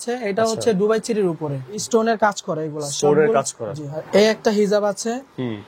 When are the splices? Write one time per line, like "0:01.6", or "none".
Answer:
0:01.8
0:04.0